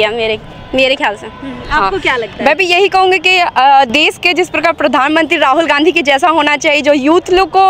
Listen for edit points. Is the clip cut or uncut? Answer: uncut